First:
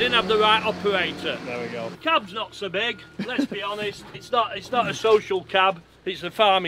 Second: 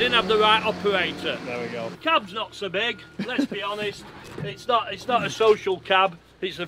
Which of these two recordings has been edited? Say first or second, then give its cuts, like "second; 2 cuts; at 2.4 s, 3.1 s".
first; 1 cut; at 4.1 s